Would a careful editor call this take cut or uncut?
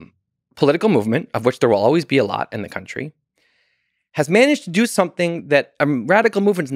uncut